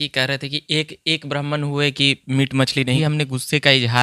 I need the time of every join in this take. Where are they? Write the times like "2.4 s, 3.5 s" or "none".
3.0 s